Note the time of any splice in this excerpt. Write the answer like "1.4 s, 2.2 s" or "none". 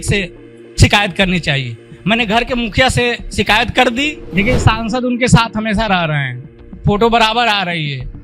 4.2 s